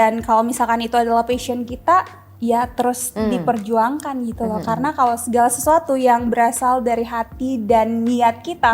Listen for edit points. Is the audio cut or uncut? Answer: cut